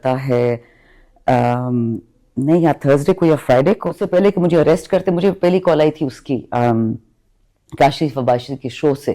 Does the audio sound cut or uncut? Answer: cut